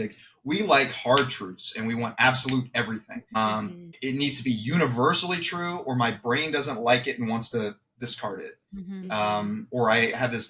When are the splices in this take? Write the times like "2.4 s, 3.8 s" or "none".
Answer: none